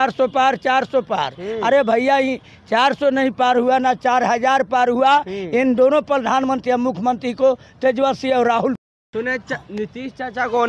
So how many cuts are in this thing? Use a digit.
0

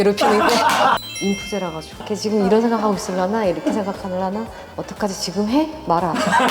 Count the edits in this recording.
2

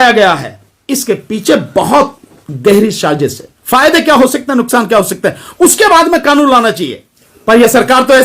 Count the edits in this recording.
1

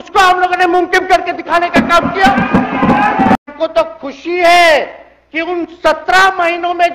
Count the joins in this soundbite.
1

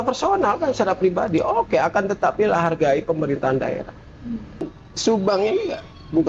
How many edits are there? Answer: 1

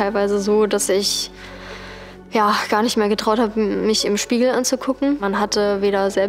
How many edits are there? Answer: 1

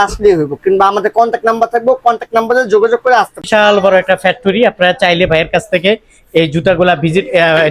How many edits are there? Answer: 1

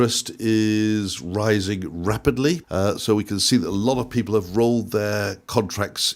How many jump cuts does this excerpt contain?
1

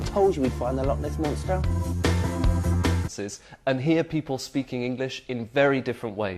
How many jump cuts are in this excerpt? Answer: 0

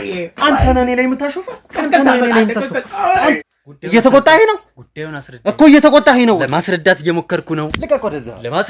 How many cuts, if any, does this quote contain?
1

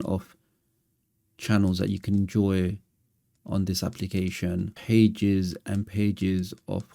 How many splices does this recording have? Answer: 1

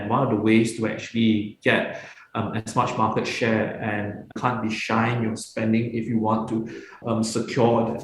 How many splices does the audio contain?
2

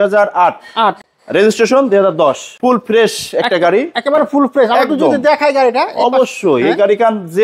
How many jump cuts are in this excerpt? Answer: 2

